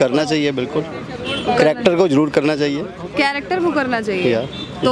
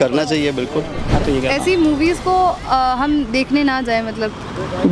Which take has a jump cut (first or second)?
second